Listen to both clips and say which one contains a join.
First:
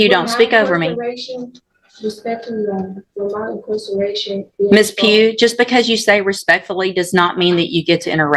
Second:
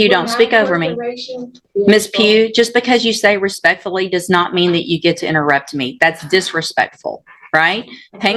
second; 1 cut; at 1.6 s

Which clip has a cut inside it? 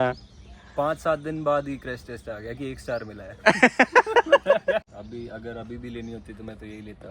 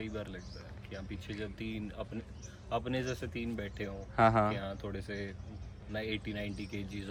first; 1 cut; at 4.8 s

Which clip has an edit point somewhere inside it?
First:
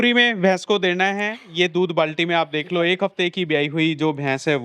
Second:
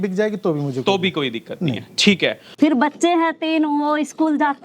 second; 1 cut; at 2.4 s

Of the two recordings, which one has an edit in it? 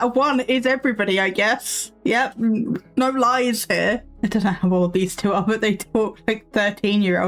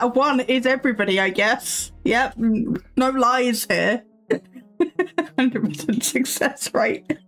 first; 1 cut; at 4.1 s

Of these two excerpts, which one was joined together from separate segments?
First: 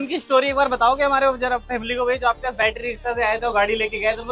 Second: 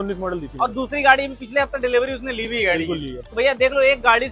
second; 1 cut; at 3.2 s

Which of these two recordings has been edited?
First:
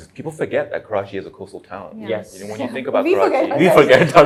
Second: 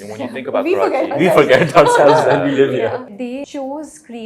second; 1 cut; at 3.1 s

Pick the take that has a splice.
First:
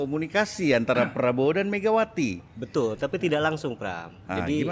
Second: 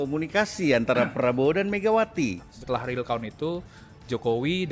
second; 1 cut; at 2.5 s

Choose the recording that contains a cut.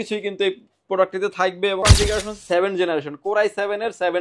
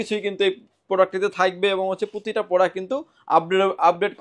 first; 1 cut; at 1.8 s

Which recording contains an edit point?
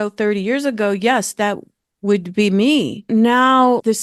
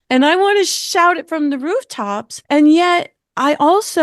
second; 1 cut; at 2.3 s

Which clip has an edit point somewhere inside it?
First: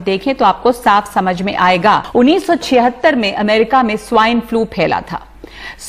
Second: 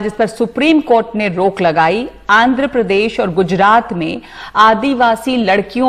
first; 1 cut; at 2.0 s

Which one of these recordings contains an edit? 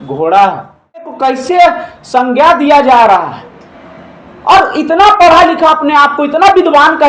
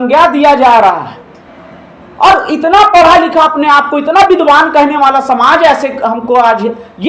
first; 1 cut; at 1.1 s

